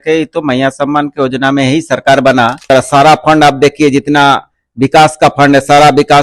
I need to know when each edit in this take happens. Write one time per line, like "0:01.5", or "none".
0:02.7